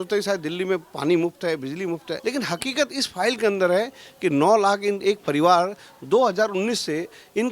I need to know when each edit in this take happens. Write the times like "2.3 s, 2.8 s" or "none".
2.1 s